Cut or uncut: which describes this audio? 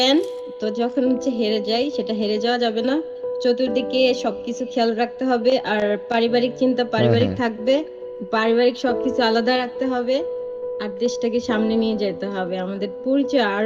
uncut